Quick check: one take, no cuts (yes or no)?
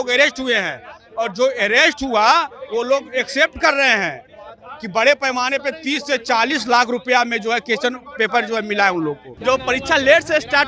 no